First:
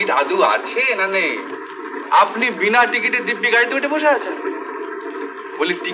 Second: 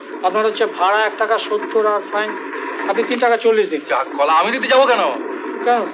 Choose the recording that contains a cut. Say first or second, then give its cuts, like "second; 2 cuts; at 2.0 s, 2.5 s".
first; 1 cut; at 1.9 s